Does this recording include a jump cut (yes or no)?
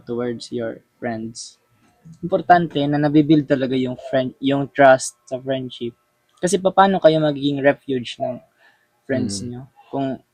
no